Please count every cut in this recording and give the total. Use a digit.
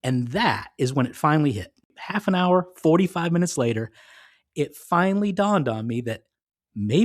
1